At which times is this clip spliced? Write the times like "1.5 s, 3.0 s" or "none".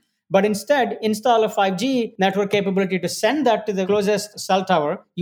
2.1 s, 3.9 s